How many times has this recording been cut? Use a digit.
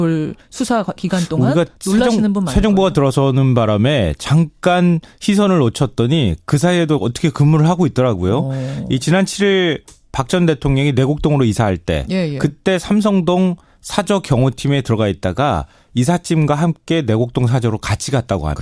1